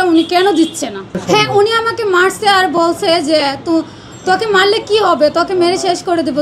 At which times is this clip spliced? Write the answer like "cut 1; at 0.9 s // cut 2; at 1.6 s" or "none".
cut 1; at 1.1 s

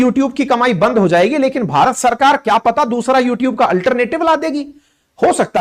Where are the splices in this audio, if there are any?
none

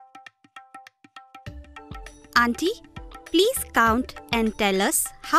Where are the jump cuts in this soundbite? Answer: cut 1; at 0.9 s // cut 2; at 2.3 s

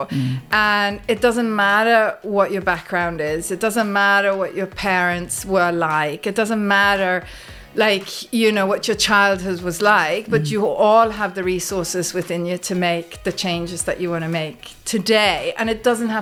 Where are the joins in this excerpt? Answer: none

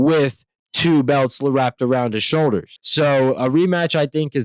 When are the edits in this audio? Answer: cut 1; at 2.8 s

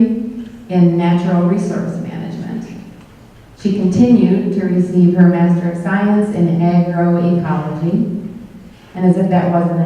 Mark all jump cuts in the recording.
cut 1; at 4.7 s

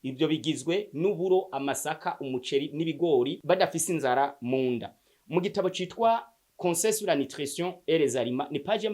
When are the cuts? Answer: cut 1; at 3.4 s

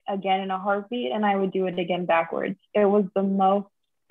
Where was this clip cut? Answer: none

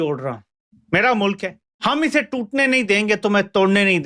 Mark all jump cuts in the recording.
cut 1; at 1.7 s

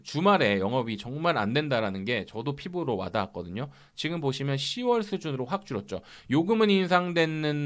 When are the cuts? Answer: none

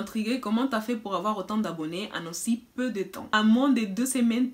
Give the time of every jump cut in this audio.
cut 1; at 3.3 s

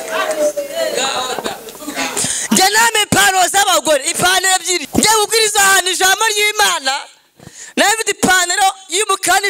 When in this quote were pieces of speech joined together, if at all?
cut 1; at 4.9 s

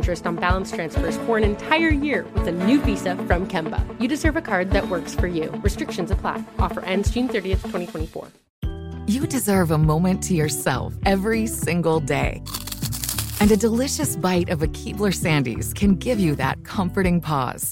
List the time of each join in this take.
cut 1; at 8.4 s

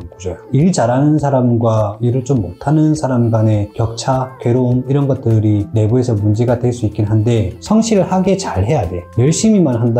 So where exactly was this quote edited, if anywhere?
cut 1; at 7.6 s

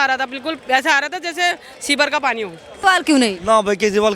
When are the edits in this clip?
cut 1; at 2.7 s

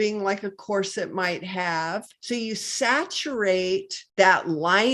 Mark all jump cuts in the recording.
cut 1; at 2.1 s // cut 2; at 4.0 s

